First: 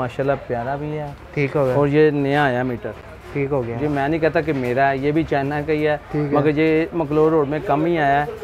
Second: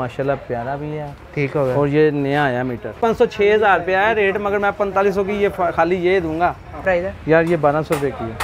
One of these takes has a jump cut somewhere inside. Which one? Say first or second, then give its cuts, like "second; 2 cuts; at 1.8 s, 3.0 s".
second; 2 cuts; at 2.9 s, 6.8 s